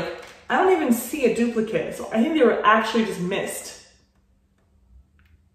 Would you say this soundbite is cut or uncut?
uncut